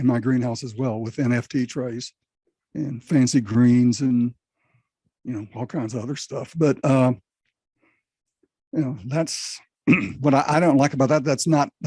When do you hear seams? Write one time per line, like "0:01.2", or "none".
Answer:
none